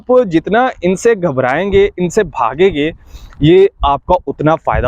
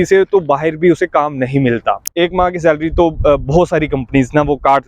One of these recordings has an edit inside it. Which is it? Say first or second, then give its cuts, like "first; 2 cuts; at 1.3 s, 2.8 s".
second; 1 cut; at 2.1 s